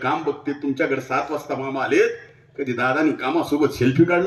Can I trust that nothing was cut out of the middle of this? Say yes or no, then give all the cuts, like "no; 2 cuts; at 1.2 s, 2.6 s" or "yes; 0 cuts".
yes; 0 cuts